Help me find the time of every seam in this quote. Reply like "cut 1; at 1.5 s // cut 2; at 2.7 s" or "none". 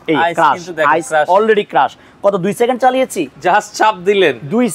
none